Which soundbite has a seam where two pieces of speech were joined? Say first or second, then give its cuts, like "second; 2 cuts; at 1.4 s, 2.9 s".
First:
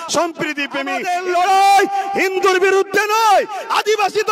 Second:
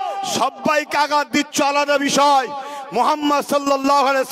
first; 1 cut; at 1.0 s